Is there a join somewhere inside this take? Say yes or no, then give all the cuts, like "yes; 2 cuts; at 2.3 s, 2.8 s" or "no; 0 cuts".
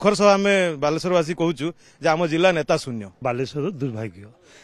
yes; 1 cut; at 3.2 s